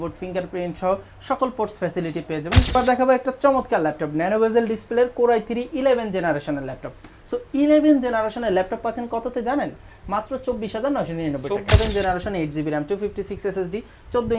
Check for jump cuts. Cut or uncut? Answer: cut